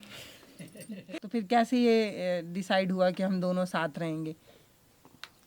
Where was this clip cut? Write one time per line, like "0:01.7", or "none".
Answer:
0:01.1